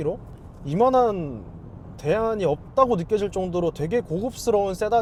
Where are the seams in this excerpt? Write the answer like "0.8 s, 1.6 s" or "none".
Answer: none